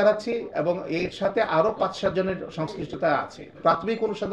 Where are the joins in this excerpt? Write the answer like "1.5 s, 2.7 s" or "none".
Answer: 3.4 s